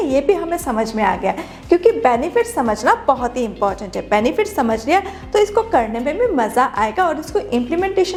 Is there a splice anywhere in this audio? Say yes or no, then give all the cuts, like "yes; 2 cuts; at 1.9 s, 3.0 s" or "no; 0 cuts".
no; 0 cuts